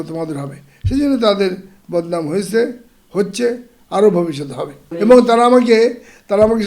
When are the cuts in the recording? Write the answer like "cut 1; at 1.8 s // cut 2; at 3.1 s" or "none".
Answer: cut 1; at 4.8 s

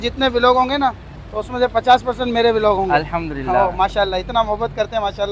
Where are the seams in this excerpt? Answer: none

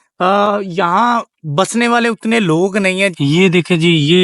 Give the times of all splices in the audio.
cut 1; at 3.2 s

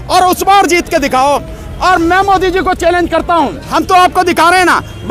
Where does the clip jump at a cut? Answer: cut 1; at 3.6 s

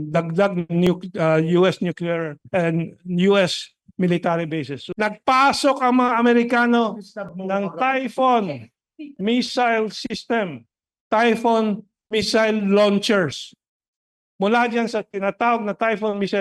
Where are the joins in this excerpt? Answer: cut 1; at 4.8 s

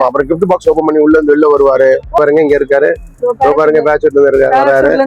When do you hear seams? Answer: cut 1; at 2.2 s

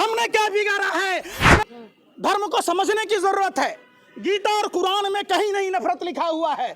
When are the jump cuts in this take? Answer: cut 1; at 1.6 s

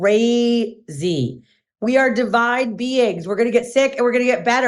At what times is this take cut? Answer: cut 1; at 1.6 s

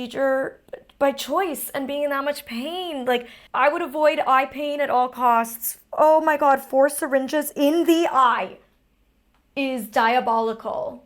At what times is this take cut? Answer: cut 1; at 3.4 s

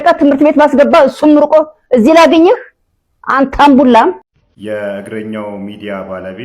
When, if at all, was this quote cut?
cut 1; at 4.3 s

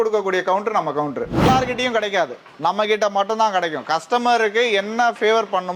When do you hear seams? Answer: cut 1; at 1.5 s

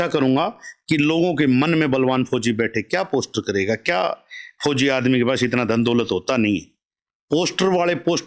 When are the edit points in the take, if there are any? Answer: none

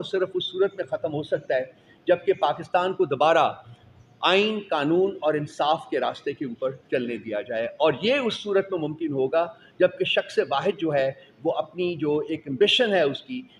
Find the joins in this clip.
none

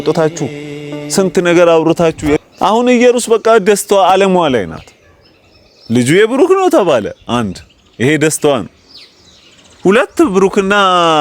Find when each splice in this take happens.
cut 1; at 2.4 s

